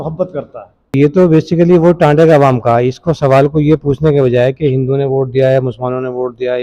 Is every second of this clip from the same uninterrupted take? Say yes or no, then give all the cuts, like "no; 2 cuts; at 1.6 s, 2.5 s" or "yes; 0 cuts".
no; 1 cut; at 0.9 s